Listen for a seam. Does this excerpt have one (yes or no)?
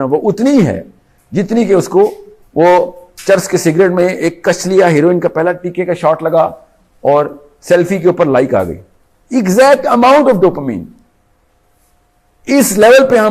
no